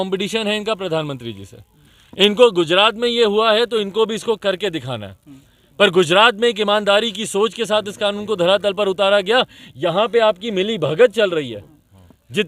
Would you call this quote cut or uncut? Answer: uncut